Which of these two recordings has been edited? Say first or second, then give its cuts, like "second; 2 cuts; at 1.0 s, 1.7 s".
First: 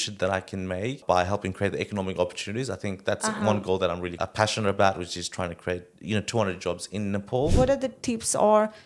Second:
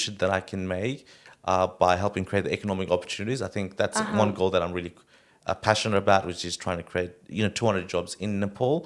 first; 3 cuts; at 1.0 s, 4.2 s, 7.5 s